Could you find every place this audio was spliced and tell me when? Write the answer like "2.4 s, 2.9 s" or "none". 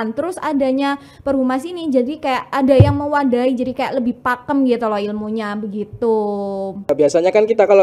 6.9 s